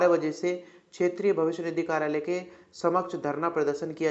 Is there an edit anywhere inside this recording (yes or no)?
no